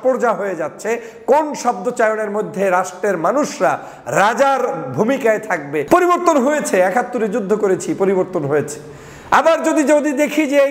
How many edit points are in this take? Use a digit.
1